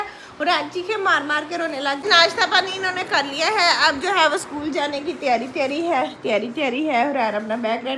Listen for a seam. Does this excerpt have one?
yes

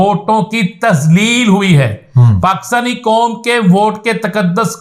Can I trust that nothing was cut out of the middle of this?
yes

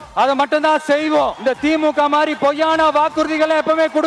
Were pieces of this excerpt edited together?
yes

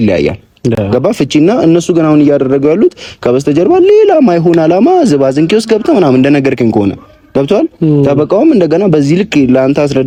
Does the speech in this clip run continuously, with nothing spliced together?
yes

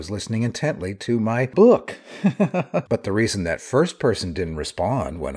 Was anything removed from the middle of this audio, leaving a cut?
yes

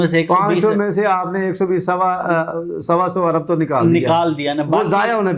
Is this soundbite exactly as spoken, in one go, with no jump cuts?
yes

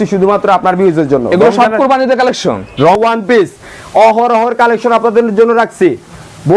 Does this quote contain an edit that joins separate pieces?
yes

